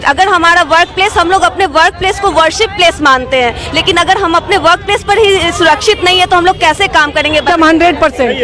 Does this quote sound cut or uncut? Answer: cut